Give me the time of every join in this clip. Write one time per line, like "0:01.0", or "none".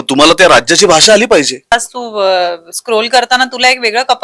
0:01.7